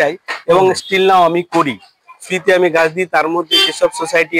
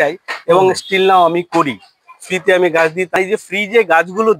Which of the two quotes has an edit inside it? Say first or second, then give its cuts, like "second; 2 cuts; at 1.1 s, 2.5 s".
second; 1 cut; at 3.1 s